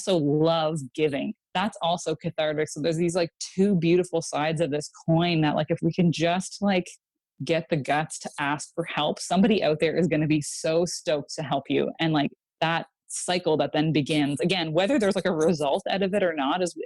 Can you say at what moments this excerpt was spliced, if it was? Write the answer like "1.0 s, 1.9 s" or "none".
none